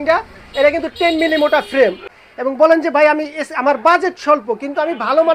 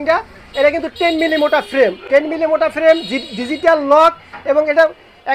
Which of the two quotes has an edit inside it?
first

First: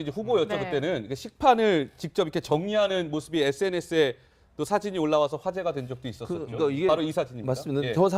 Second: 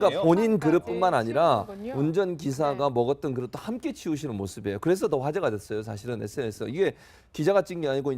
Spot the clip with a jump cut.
second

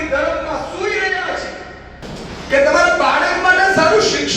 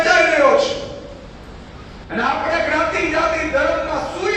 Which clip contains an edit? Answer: first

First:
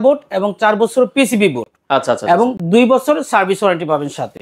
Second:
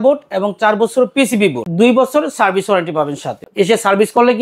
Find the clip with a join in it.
second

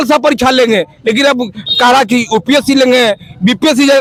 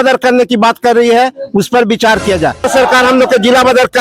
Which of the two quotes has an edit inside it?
second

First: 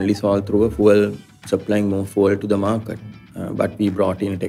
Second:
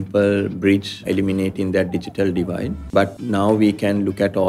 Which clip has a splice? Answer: second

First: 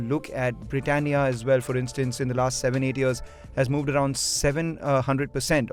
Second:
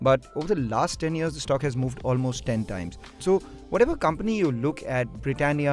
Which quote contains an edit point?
second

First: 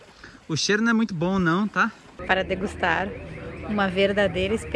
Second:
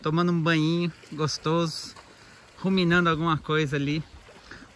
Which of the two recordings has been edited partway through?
first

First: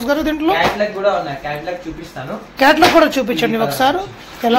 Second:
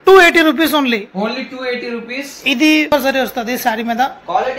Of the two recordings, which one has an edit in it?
second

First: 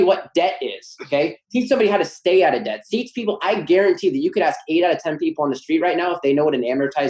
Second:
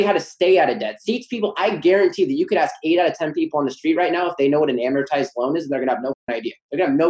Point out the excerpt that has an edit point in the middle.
second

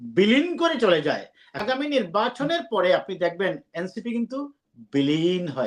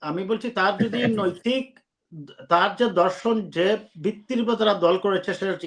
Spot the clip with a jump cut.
first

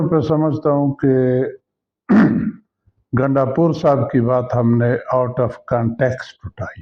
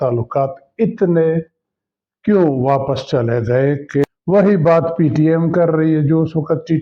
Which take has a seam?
second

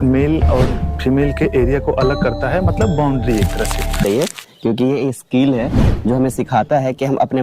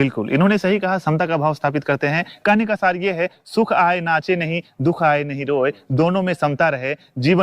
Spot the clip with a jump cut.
first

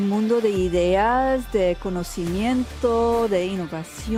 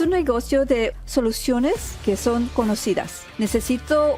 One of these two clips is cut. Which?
second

